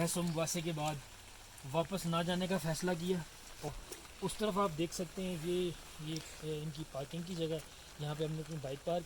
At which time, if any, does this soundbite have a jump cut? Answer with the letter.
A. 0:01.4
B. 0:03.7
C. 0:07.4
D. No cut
B